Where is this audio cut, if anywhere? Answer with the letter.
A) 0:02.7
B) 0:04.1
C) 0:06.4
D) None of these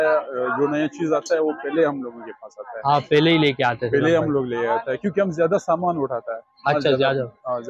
D